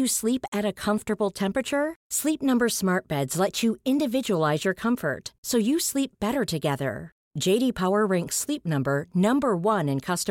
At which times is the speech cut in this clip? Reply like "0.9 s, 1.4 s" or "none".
none